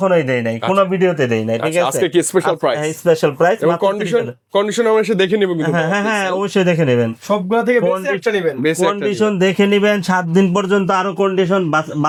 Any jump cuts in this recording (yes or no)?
no